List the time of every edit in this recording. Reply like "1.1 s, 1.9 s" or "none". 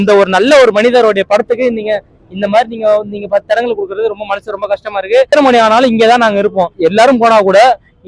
none

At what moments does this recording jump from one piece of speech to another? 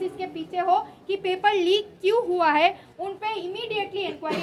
none

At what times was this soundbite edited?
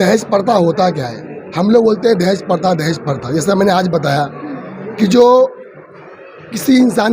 none

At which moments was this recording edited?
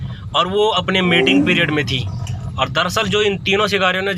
none

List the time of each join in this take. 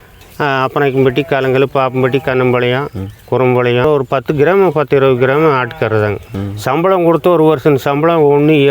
3.8 s, 6.3 s

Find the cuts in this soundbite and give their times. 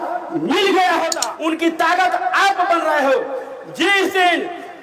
1.2 s

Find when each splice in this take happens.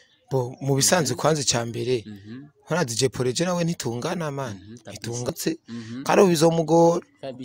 5.3 s

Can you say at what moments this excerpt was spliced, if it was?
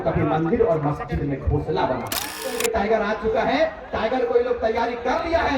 2.3 s

